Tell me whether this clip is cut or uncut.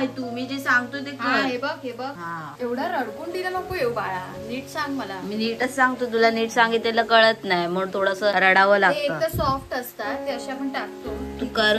uncut